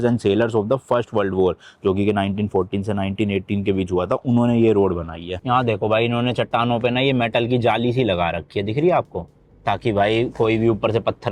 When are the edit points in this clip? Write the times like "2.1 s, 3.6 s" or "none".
5.2 s